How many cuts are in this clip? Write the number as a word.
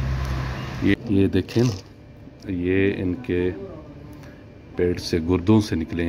one